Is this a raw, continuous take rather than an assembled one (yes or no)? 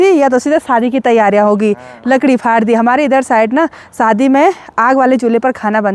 yes